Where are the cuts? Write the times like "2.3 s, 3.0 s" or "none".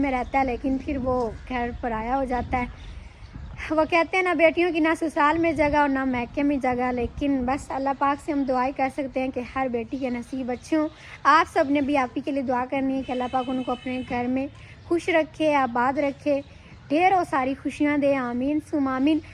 none

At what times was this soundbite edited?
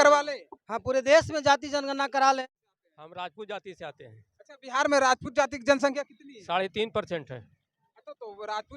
2.4 s

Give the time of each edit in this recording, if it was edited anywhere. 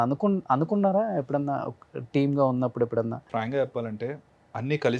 3.3 s

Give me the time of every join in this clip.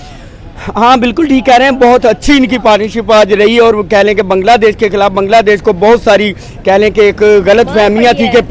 none

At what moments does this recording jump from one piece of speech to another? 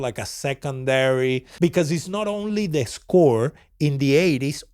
1.5 s

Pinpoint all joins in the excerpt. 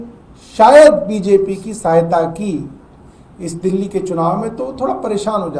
none

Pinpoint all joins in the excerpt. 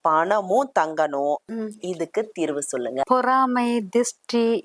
1.5 s, 3.0 s

